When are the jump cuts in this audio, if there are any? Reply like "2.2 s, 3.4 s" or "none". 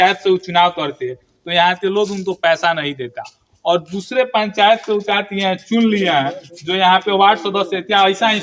none